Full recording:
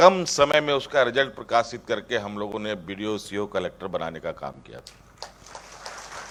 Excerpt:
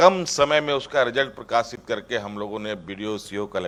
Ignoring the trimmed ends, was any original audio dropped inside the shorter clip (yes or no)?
no